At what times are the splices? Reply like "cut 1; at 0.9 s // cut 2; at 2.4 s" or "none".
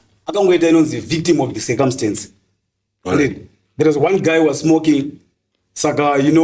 none